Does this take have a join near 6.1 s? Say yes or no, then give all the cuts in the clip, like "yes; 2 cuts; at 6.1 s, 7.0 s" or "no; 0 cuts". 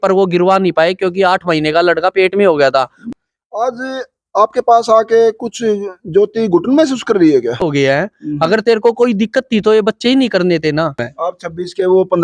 no; 3 cuts; at 3.0 s, 7.7 s, 11.1 s